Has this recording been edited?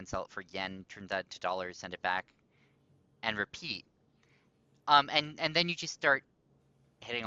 no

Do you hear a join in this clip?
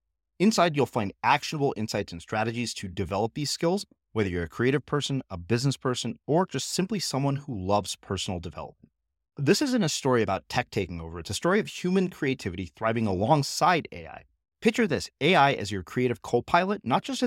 no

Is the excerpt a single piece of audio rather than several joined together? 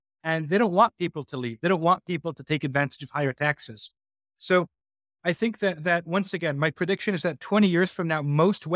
yes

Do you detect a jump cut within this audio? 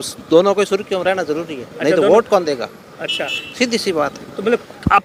no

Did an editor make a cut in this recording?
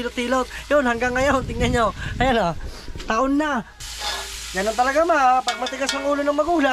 yes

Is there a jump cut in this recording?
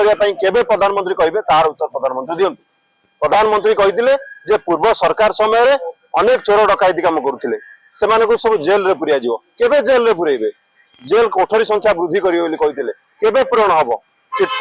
no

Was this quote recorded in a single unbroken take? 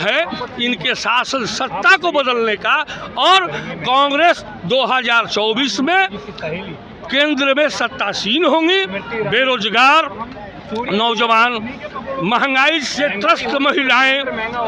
yes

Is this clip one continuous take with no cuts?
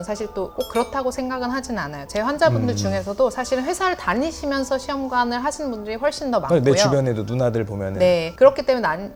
yes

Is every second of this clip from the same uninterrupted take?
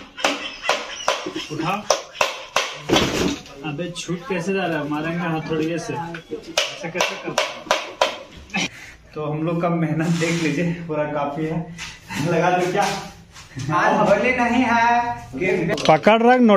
no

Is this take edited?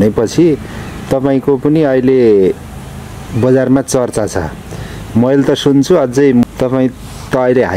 no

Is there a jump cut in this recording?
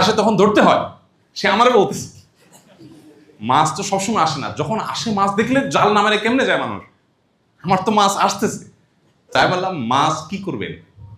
no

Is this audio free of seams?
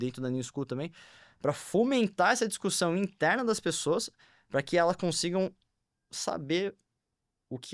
yes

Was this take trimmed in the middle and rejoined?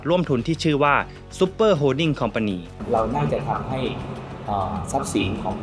yes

